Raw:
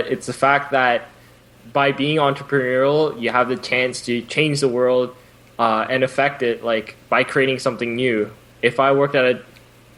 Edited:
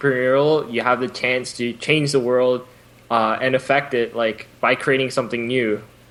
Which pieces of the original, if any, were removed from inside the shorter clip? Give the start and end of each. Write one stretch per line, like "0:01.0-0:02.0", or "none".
none